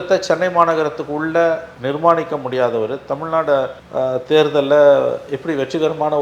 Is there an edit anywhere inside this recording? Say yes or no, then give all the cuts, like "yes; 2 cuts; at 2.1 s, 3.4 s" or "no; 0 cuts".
yes; 1 cut; at 3.8 s